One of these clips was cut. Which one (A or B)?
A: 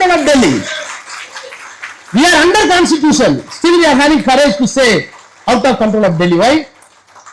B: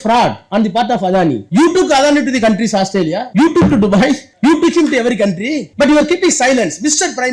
B